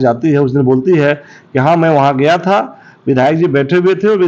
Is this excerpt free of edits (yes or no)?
yes